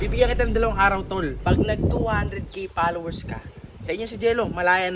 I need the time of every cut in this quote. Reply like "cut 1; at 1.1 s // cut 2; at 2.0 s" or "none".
none